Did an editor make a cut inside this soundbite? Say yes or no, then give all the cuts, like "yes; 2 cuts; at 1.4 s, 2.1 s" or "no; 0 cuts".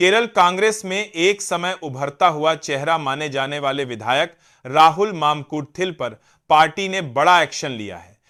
no; 0 cuts